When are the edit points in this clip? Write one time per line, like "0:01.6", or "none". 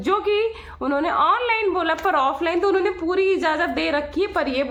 none